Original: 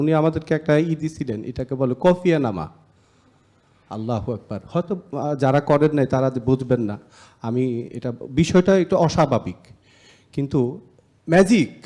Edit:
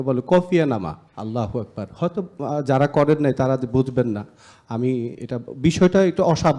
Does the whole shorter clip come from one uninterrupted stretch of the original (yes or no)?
no